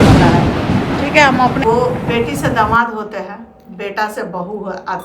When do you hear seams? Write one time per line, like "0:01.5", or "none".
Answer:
0:01.7